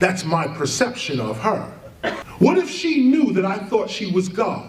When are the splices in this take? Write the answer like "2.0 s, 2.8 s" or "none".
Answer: 2.2 s